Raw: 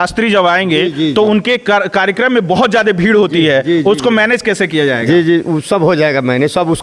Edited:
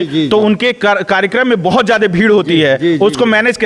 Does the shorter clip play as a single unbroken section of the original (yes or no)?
yes